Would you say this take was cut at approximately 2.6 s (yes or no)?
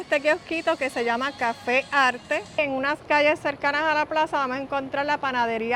yes